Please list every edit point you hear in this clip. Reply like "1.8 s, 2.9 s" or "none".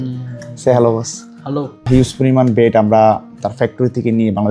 1.9 s